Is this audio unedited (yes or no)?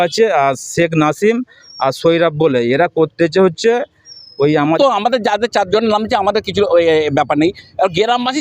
no